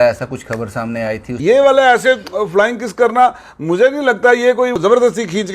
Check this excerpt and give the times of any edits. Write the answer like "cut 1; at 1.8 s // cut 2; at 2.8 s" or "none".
cut 1; at 1.3 s // cut 2; at 4.8 s